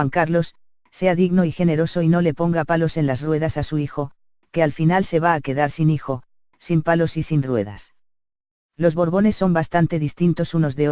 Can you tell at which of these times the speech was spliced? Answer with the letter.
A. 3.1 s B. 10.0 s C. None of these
B